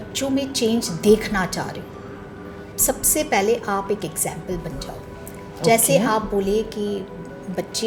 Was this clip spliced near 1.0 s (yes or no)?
no